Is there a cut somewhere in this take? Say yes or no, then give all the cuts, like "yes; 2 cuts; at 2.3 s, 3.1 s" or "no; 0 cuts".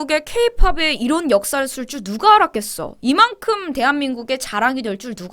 no; 0 cuts